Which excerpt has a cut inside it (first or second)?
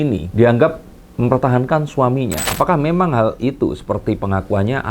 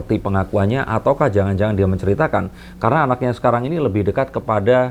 first